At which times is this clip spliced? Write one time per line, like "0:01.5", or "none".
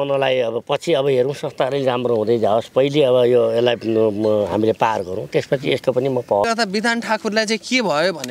0:06.4